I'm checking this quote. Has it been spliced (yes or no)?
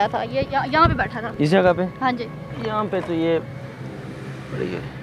yes